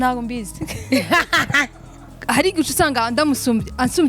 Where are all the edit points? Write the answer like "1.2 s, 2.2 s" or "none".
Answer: 2.2 s

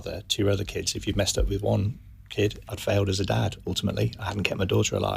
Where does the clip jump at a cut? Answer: 2.7 s

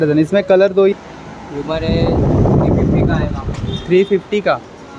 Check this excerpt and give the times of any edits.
0.9 s

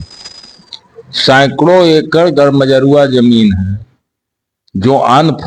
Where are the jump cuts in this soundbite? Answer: none

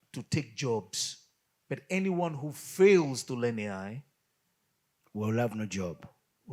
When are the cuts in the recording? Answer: none

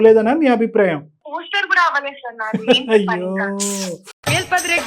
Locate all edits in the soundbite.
none

